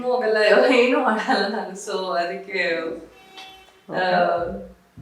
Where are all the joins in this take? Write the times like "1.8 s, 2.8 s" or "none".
none